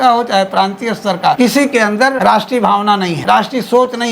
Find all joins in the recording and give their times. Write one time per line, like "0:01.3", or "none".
0:01.4
0:02.2
0:03.2

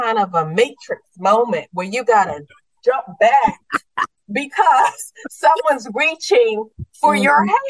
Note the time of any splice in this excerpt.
none

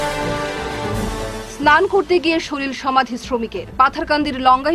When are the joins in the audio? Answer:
0:00.9

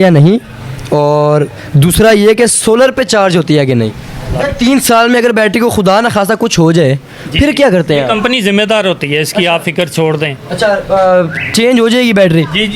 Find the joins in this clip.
0:04.3

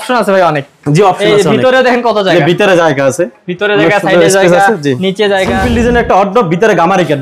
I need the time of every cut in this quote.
0:05.6

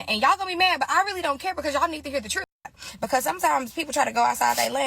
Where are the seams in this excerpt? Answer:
0:02.8

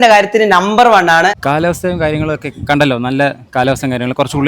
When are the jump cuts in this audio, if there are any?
0:01.4

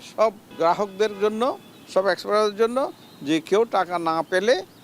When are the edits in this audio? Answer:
none

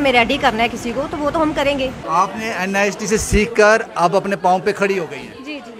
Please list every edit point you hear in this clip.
0:02.0

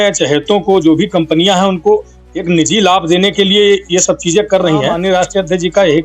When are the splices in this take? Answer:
0:05.0

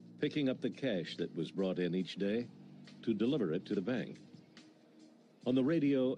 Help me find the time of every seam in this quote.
none

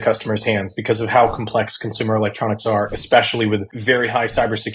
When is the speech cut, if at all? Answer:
0:03.7

